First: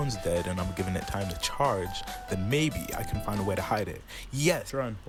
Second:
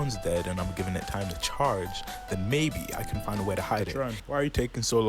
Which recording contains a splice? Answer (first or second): second